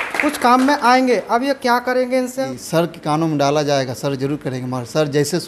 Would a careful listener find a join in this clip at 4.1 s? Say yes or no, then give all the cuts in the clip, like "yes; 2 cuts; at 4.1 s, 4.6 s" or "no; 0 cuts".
no; 1 cut; at 2.4 s